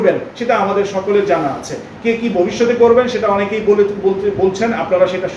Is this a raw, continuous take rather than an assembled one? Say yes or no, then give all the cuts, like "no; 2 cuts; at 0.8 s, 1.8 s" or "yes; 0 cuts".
yes; 0 cuts